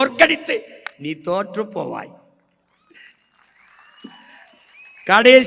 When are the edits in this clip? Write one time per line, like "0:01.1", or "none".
none